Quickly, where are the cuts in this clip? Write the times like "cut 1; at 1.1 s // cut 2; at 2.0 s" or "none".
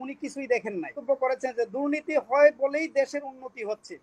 cut 1; at 1.0 s

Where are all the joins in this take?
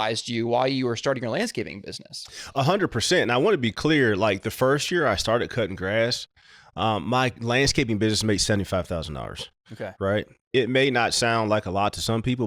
none

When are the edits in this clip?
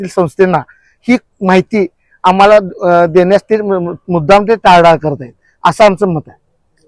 none

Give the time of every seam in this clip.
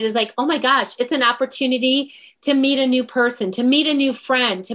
none

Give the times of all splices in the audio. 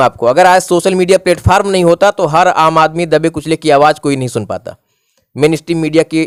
none

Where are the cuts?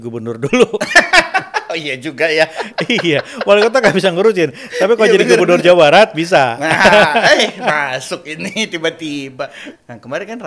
none

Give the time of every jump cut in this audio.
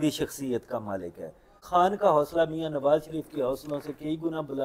cut 1; at 1.6 s

